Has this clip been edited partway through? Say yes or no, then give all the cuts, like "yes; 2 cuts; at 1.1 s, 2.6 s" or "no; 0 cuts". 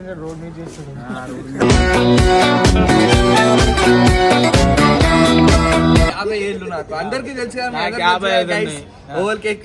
yes; 1 cut; at 6.1 s